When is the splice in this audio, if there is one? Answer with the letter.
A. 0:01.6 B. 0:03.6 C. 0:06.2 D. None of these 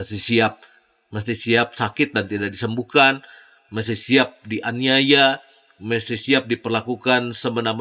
D